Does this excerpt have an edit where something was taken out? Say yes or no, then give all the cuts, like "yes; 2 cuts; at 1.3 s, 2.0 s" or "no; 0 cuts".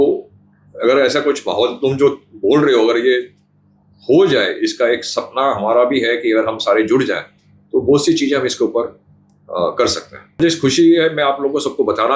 yes; 1 cut; at 10.4 s